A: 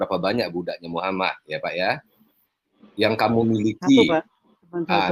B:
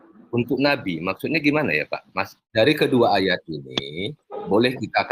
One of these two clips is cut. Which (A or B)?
B